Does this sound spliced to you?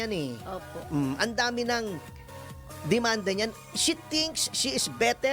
no; 0 cuts

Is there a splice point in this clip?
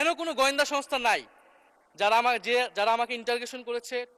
no; 0 cuts

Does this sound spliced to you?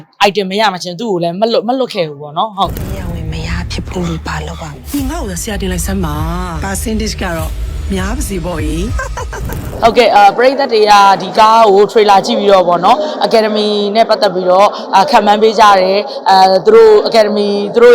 yes; 1 cut; at 9.6 s

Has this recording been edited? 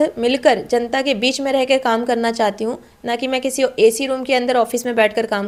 no; 0 cuts

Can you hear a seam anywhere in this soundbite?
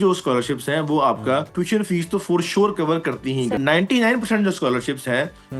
yes; 2 cuts; at 1.5 s, 3.6 s

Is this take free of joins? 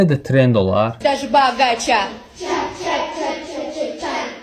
no; 1 cut; at 0.9 s

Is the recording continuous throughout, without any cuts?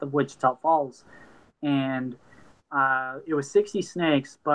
yes; 0 cuts

